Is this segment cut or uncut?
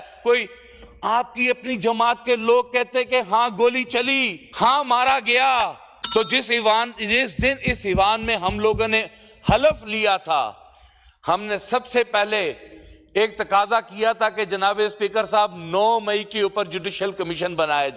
cut